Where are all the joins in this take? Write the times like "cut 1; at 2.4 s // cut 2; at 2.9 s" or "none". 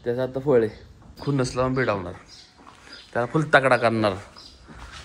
cut 1; at 1.2 s